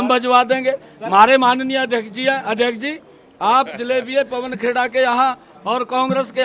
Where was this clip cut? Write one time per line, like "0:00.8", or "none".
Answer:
none